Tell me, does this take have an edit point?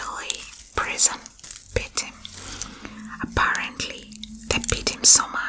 yes; 1 cut; at 1.6 s

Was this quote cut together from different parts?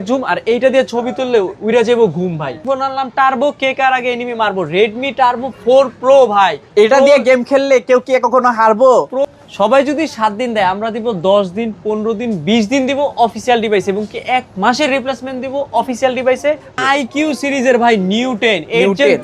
yes; 3 cuts; at 2.6 s, 9.2 s, 16.8 s

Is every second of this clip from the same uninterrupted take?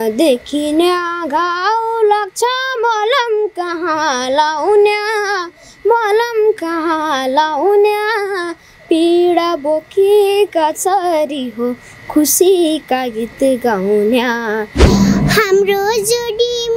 no; 1 cut; at 14.8 s

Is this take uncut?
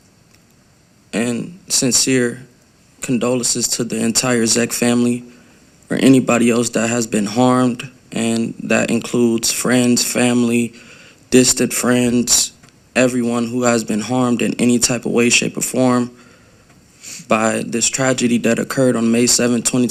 yes; 0 cuts

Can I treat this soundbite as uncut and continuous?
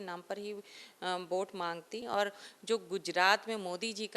no; 1 cut; at 2.0 s

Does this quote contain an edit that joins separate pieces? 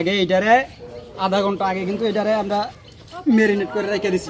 no; 0 cuts

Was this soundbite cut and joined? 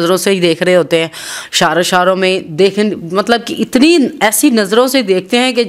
no; 0 cuts

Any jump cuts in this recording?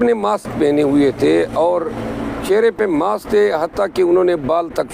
no; 0 cuts

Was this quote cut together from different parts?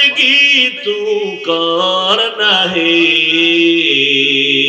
no; 0 cuts

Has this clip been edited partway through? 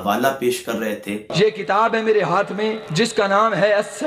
yes; 2 cuts; at 1.3 s, 2.8 s

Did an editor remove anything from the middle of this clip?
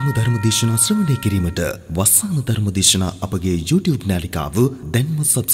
no; 0 cuts

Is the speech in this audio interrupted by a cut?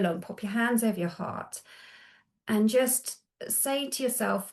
no; 0 cuts

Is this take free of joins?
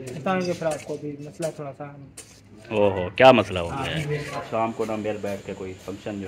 no; 1 cut; at 4.5 s

